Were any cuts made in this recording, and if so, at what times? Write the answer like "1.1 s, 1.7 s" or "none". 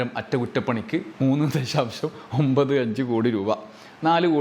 none